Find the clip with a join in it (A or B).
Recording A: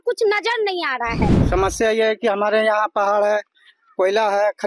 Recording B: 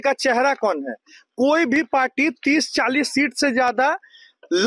A